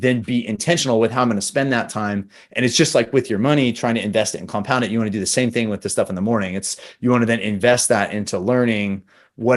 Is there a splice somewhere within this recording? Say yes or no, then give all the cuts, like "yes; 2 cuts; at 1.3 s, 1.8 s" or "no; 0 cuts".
no; 0 cuts